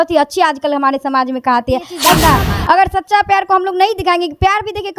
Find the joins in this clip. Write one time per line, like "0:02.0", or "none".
0:02.2